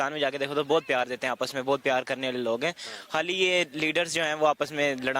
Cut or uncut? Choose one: cut